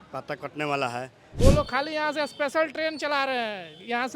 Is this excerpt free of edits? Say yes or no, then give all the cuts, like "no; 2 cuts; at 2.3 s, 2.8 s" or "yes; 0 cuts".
no; 1 cut; at 1.2 s